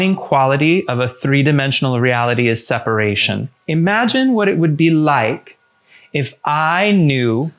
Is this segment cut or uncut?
cut